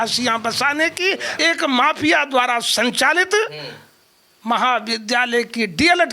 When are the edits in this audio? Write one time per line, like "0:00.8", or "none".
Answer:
0:01.3